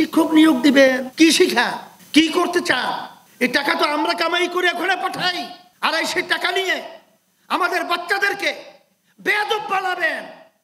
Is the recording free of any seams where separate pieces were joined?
no; 1 cut; at 1.0 s

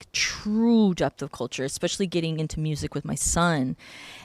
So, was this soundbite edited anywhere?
no; 0 cuts

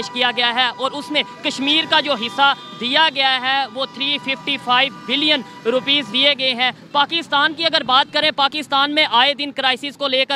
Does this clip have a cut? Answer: no; 0 cuts

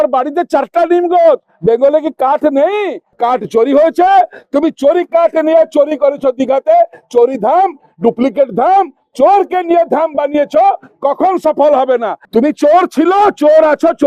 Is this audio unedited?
no; 2 cuts; at 3.0 s, 12.2 s

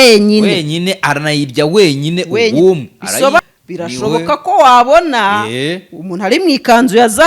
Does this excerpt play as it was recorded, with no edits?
no; 1 cut; at 3.4 s

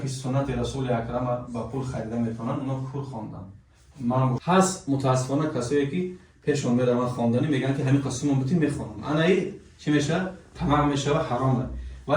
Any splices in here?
yes; 1 cut; at 4.4 s

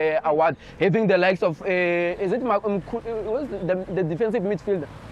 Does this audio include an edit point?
no; 0 cuts

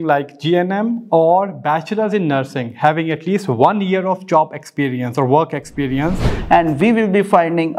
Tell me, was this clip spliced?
yes; 1 cut; at 6.3 s

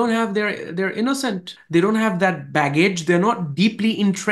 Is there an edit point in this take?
yes; 1 cut; at 1.5 s

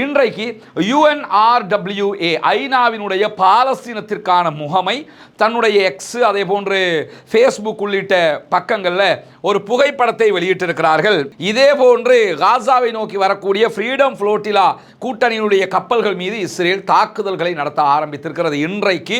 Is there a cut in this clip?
yes; 1 cut; at 11.3 s

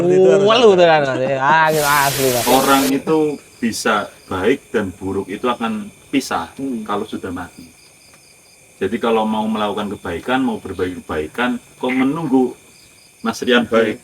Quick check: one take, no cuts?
no; 1 cut; at 2.4 s

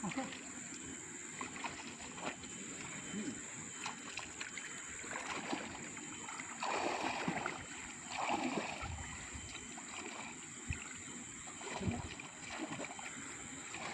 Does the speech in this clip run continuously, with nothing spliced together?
no; 1 cut; at 10.8 s

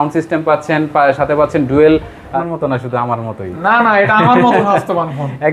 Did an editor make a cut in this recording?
yes; 1 cut; at 2.3 s

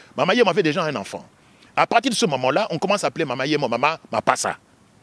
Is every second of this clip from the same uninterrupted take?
yes; 0 cuts

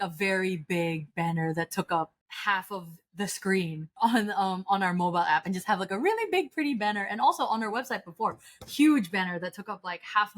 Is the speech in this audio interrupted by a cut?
yes; 2 cuts; at 2.2 s, 3.9 s

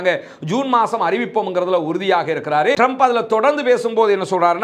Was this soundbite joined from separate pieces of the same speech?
yes; 1 cut; at 2.8 s

